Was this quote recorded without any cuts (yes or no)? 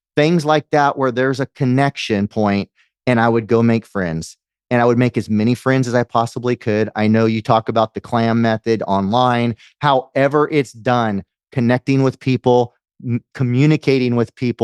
yes